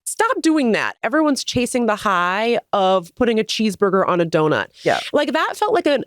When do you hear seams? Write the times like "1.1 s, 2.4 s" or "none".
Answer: 1.0 s